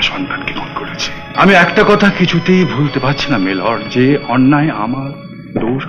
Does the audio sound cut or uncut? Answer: cut